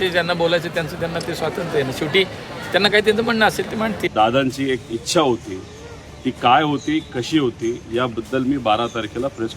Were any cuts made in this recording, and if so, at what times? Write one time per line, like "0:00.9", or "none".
0:04.1